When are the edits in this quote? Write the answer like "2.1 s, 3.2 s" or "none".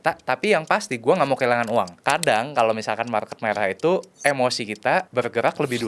2.0 s, 5.1 s